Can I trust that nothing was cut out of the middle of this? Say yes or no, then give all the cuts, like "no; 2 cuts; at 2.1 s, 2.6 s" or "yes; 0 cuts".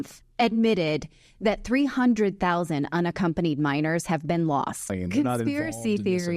no; 1 cut; at 4.9 s